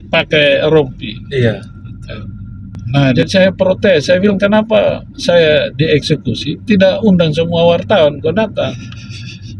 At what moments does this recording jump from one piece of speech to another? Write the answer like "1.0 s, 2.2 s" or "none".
3.2 s

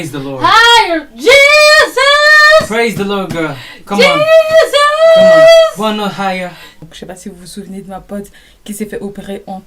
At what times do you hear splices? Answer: 6.7 s

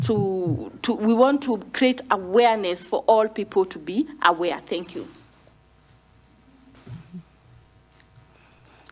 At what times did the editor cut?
none

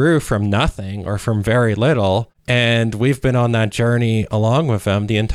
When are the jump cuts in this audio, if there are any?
2.4 s

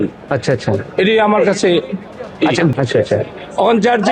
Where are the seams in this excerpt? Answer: 2.7 s

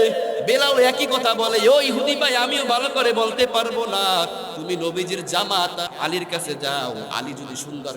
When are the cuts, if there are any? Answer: 5.9 s

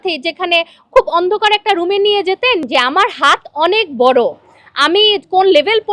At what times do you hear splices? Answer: 2.6 s

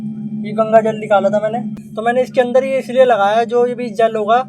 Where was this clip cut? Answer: 1.7 s

